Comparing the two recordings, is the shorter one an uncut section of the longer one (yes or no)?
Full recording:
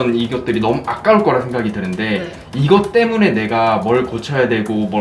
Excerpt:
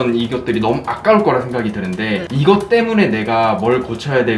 no